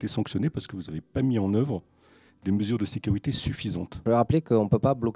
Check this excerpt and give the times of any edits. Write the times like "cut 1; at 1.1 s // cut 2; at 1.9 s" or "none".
cut 1; at 4.0 s

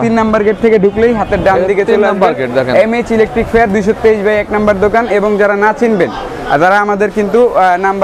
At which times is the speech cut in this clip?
none

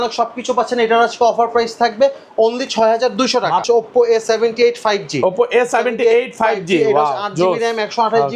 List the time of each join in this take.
cut 1; at 3.6 s

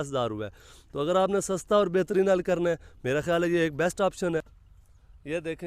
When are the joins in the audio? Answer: cut 1; at 4.6 s

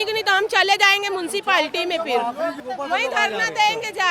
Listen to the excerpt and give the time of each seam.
cut 1; at 2.6 s

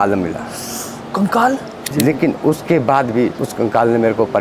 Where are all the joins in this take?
cut 1; at 1.9 s // cut 2; at 3.4 s

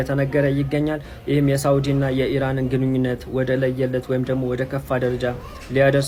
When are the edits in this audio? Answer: none

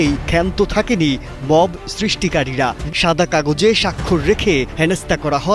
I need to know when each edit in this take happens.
cut 1; at 2.8 s

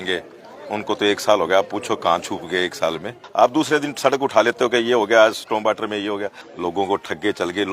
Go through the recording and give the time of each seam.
cut 1; at 3.2 s // cut 2; at 6.4 s

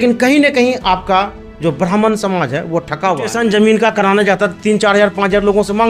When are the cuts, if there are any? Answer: cut 1; at 3.3 s

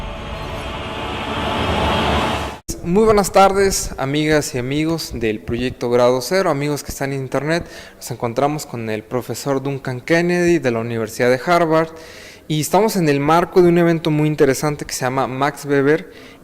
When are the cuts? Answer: cut 1; at 2.2 s // cut 2; at 11.7 s

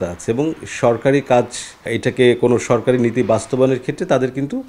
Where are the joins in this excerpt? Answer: cut 1; at 1.9 s

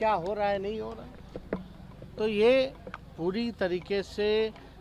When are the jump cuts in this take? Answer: none

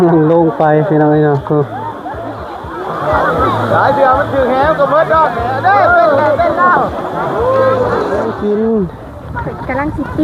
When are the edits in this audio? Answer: cut 1; at 8.3 s

